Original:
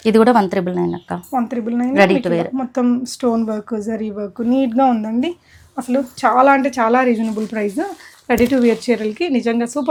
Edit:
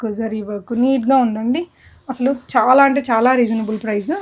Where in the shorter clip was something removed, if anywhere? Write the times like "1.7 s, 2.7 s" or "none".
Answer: none